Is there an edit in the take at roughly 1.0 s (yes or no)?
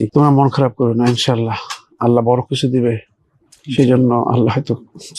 no